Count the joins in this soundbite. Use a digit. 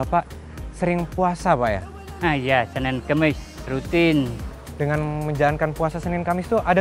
2